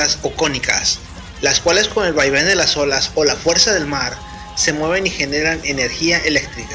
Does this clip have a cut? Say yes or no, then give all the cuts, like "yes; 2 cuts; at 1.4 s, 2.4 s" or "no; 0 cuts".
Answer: no; 0 cuts